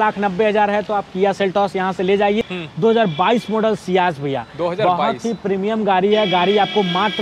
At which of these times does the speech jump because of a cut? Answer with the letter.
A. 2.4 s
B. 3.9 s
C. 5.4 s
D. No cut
A